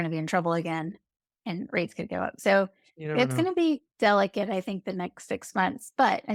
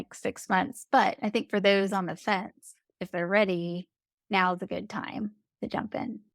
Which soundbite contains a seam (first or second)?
second